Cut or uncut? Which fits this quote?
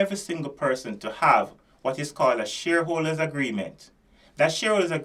uncut